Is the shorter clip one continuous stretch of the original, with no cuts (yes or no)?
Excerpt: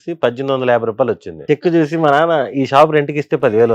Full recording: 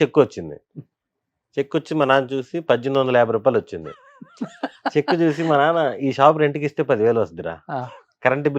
no